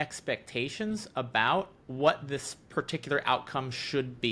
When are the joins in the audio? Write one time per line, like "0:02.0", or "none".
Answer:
none